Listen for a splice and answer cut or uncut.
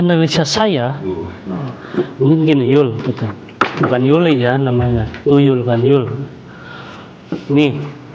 uncut